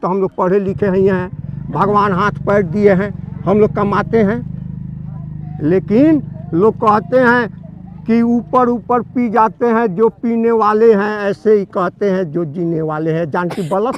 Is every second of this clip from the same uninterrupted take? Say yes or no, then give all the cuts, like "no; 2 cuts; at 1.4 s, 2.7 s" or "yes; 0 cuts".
yes; 0 cuts